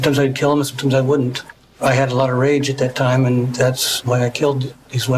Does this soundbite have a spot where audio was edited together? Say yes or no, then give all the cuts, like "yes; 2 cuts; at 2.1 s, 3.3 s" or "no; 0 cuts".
yes; 1 cut; at 3.9 s